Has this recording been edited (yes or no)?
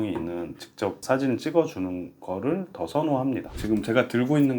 yes